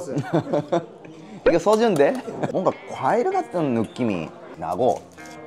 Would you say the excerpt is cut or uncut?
cut